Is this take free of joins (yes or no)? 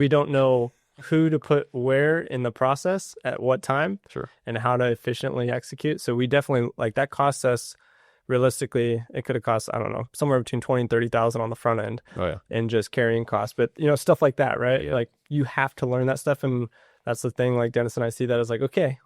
yes